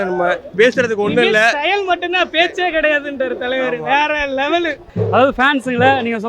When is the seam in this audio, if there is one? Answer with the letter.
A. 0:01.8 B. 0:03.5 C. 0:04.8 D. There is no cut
C